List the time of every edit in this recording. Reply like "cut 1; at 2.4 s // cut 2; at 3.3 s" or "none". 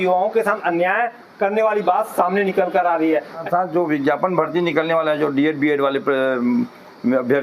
cut 1; at 3.4 s